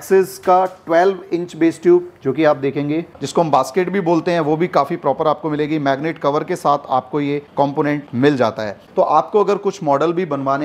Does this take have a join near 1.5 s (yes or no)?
no